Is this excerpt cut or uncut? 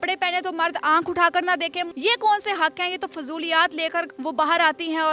cut